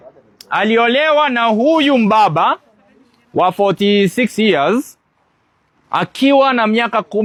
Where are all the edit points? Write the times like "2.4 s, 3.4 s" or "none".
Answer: none